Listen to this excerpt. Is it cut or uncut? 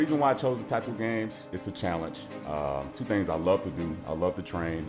cut